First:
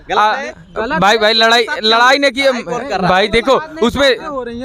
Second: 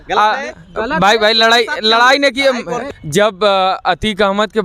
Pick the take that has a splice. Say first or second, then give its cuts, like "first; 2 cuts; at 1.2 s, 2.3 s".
second; 1 cut; at 2.8 s